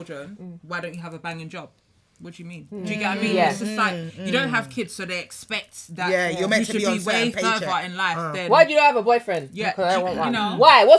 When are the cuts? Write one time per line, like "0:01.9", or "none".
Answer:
none